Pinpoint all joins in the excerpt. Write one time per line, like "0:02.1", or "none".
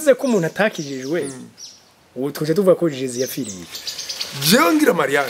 0:03.7